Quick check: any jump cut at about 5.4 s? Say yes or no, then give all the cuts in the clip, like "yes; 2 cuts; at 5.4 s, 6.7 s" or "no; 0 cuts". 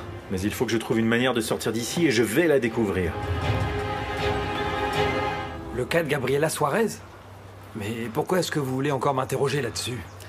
yes; 1 cut; at 5.4 s